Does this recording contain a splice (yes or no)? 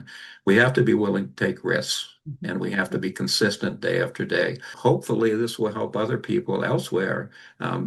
yes